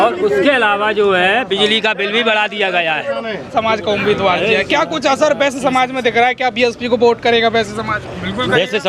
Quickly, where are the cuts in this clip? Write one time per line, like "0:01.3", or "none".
0:03.5